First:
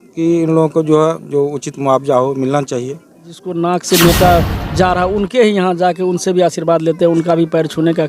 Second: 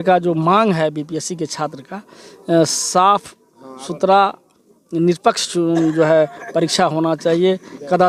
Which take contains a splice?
first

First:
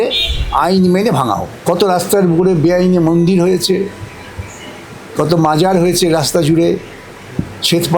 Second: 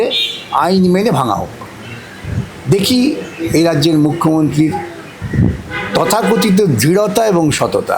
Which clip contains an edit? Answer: first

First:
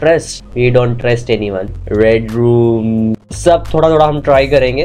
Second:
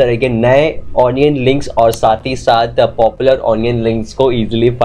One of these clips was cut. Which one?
first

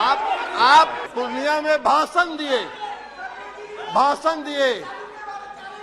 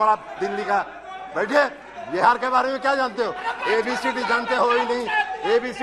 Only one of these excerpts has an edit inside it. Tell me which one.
first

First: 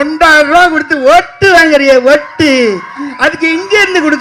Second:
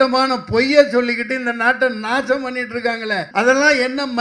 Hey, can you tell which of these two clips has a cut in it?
second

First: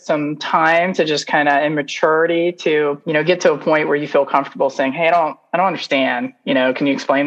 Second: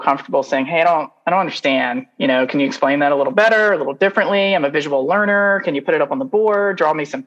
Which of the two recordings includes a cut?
first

